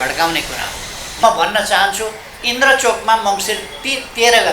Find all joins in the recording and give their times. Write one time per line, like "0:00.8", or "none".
0:01.2